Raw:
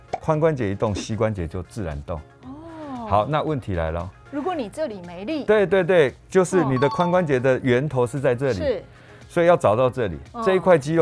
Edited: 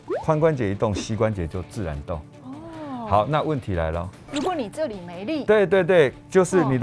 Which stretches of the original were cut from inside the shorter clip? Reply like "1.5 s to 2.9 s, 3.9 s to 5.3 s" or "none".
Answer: none